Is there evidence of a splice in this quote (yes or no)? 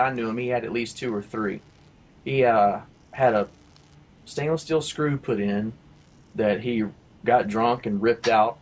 no